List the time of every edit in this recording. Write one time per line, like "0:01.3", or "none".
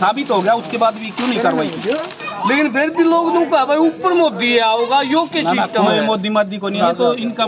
0:02.2
0:06.7